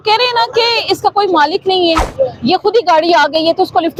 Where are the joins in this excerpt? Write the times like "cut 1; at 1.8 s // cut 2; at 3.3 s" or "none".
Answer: none